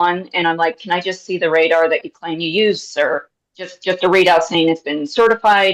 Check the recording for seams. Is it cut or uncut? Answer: uncut